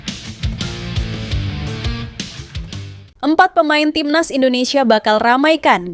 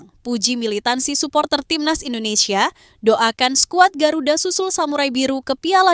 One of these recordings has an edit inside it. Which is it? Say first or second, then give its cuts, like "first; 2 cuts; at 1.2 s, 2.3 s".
first; 1 cut; at 3.0 s